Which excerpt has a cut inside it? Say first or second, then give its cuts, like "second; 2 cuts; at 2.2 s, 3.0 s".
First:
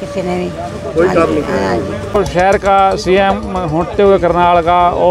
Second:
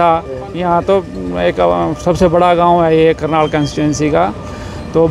first; 1 cut; at 2.2 s